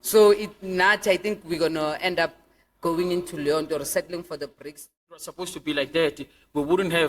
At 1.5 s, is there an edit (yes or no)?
no